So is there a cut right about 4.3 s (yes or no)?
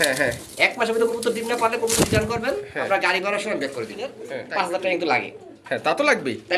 yes